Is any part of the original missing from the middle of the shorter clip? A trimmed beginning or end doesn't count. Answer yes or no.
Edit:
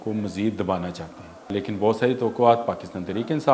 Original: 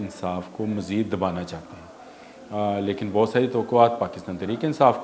yes